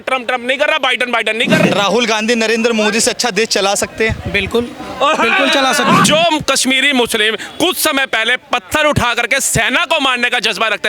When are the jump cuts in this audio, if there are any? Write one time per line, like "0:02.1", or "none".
0:01.6
0:06.1